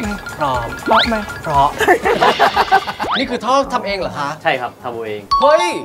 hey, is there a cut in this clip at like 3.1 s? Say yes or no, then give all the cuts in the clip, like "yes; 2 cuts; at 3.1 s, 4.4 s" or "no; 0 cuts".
yes; 1 cut; at 3.1 s